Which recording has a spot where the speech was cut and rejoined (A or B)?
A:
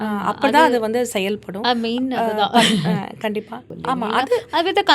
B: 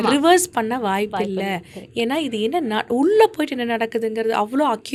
A